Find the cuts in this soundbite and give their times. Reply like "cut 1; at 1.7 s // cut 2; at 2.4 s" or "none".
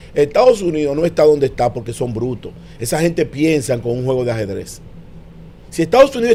none